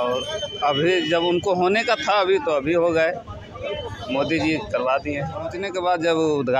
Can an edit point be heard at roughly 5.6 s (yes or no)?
yes